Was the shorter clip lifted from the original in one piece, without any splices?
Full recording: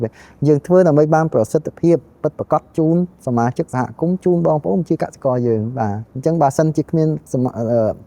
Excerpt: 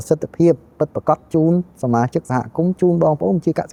yes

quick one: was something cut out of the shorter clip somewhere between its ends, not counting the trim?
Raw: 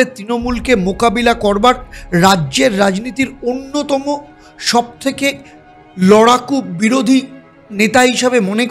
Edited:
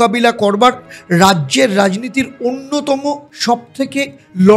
yes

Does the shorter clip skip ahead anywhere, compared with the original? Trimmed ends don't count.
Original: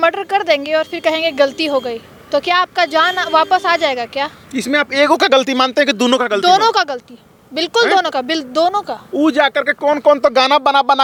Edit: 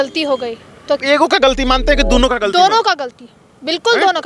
yes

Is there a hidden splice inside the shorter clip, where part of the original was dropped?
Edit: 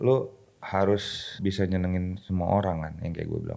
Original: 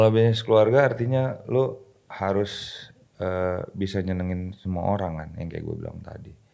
yes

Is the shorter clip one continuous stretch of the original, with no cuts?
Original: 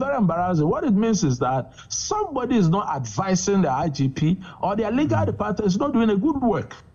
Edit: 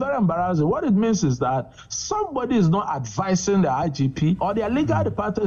no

